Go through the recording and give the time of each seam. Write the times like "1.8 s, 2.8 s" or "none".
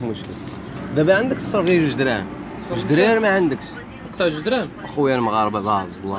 none